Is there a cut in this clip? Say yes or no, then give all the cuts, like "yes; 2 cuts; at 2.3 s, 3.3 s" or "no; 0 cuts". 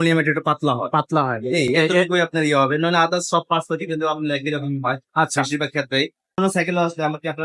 yes; 1 cut; at 6.4 s